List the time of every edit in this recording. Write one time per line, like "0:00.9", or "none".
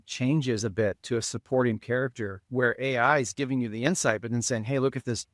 none